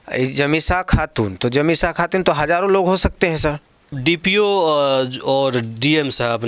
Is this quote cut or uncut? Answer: cut